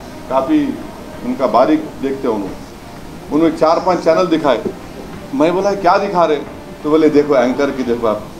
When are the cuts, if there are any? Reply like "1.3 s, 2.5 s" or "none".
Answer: none